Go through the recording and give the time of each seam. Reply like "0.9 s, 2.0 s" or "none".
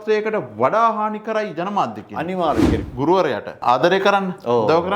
2.8 s, 3.6 s